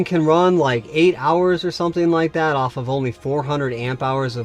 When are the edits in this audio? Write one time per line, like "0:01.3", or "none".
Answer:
none